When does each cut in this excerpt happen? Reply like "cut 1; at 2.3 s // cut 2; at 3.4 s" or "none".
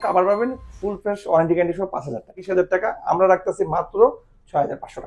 cut 1; at 2.4 s